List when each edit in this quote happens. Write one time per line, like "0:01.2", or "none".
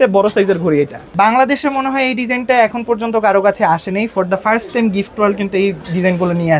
0:01.1